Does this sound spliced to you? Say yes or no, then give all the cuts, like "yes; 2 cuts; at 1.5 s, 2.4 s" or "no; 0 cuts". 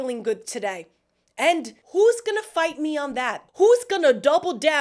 yes; 2 cuts; at 1.8 s, 3.4 s